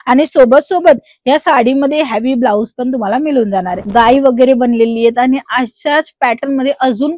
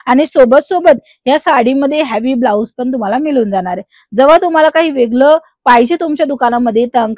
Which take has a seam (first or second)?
first